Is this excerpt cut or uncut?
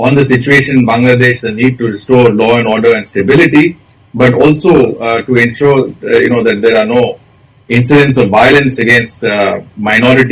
uncut